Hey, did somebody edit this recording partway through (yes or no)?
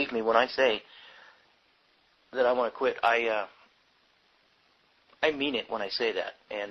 no